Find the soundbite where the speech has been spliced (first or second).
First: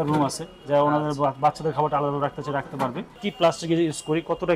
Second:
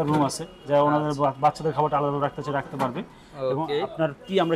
first